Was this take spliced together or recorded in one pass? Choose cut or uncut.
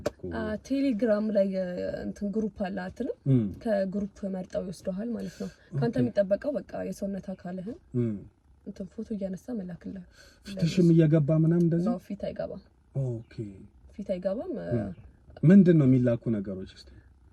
uncut